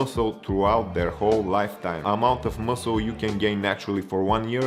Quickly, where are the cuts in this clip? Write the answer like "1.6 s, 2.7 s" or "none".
2.0 s